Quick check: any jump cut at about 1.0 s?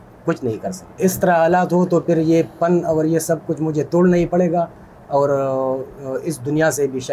yes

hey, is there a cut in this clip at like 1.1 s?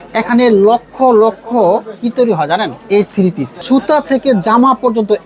no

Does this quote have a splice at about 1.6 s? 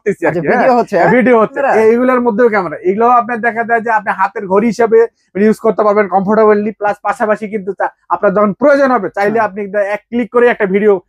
yes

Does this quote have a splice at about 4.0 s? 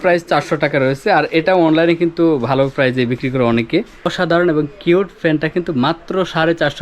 yes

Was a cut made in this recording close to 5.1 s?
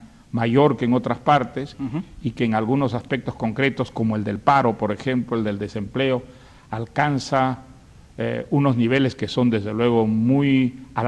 yes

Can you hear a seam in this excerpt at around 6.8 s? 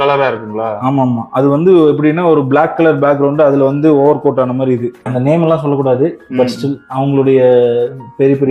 no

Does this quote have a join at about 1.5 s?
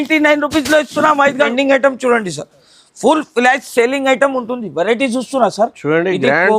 yes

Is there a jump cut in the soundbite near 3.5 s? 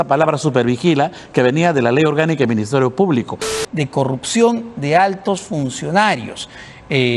yes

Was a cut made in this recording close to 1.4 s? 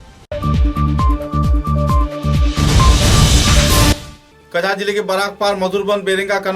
no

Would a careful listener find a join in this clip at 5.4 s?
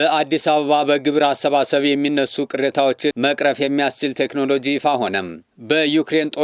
yes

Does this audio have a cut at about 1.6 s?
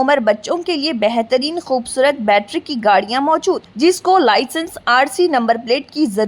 no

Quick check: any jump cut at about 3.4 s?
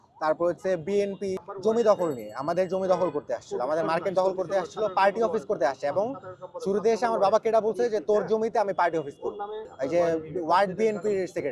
no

